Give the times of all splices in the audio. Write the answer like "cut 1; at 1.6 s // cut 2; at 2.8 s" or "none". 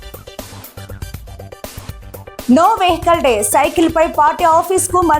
cut 1; at 1.0 s